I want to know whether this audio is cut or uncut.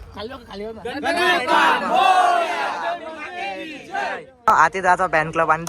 cut